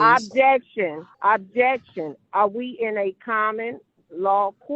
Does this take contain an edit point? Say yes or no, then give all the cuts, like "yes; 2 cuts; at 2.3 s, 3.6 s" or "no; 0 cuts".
yes; 1 cut; at 1.1 s